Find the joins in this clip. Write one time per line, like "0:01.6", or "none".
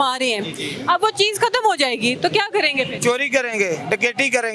none